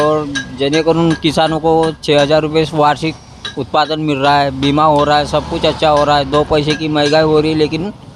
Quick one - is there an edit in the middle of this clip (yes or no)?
no